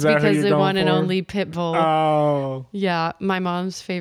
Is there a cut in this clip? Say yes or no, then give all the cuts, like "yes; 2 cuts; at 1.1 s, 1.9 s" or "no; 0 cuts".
no; 0 cuts